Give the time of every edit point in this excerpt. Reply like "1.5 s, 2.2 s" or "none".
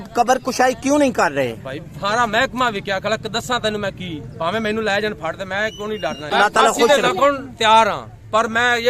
6.3 s